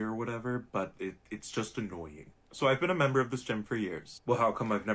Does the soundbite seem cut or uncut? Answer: uncut